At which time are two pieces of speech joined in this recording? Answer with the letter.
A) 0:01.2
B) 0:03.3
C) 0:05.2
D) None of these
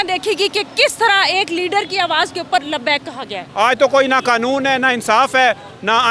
B